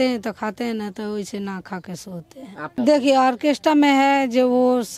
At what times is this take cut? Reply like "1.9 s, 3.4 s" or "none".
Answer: 2.6 s